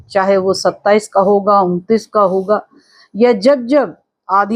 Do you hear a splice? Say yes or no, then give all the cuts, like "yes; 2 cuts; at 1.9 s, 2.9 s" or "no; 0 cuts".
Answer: no; 0 cuts